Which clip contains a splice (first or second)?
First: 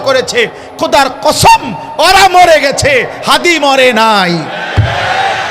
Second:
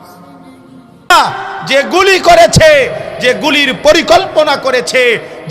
second